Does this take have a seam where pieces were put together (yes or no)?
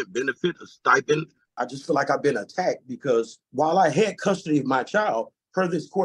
yes